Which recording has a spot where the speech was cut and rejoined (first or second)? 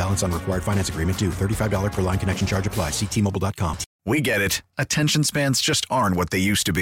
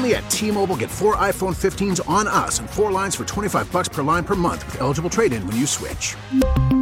first